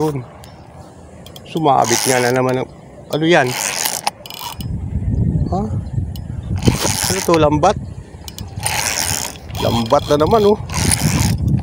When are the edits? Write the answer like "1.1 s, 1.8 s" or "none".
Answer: none